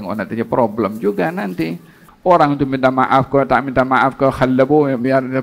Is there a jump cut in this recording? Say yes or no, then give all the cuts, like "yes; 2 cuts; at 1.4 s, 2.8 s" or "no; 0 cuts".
yes; 1 cut; at 2.0 s